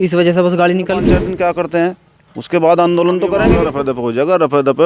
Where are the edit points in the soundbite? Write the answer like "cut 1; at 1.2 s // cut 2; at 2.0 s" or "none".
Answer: cut 1; at 1.3 s // cut 2; at 3.6 s